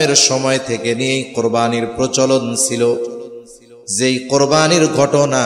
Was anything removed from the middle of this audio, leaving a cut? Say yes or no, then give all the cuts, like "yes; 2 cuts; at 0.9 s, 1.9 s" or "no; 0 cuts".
no; 0 cuts